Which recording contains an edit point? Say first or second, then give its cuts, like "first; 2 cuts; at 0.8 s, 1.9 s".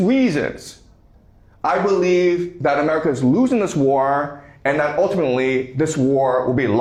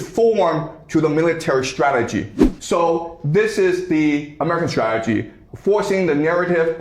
second; 2 cuts; at 2.5 s, 5.4 s